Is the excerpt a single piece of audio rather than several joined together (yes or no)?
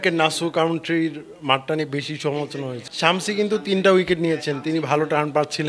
no